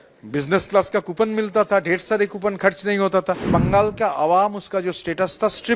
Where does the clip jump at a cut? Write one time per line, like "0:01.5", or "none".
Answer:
0:03.4

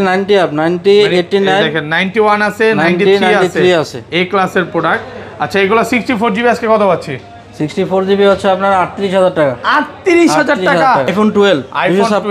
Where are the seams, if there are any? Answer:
0:11.1

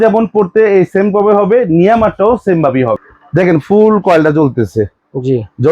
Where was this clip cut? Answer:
0:03.0

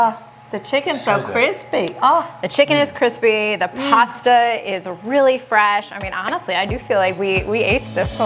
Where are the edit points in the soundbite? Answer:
none

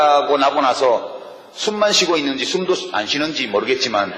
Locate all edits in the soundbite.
0:01.8

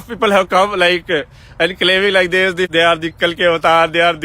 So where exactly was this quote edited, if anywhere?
0:02.7

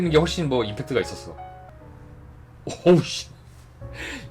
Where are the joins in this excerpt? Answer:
0:01.9

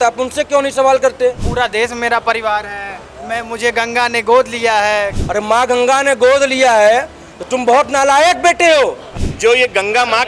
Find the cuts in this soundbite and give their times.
0:01.4
0:05.1
0:09.1

